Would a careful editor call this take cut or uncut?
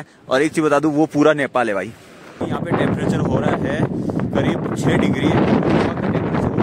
cut